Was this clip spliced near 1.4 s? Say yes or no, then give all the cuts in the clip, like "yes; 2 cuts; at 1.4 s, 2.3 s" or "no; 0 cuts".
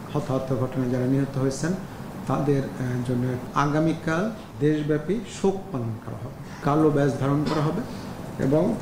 no; 3 cuts; at 3.4 s, 4.5 s, 6.6 s